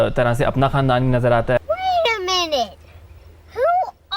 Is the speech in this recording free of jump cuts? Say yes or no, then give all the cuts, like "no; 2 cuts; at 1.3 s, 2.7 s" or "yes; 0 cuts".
yes; 0 cuts